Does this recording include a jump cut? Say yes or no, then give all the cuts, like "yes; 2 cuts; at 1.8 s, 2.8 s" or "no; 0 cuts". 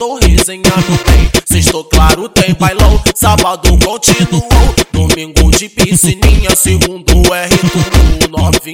yes; 1 cut; at 1.0 s